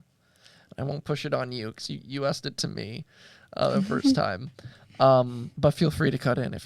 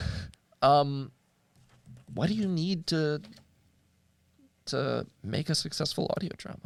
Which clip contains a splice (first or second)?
first